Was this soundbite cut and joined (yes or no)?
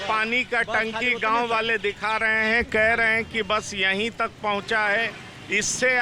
no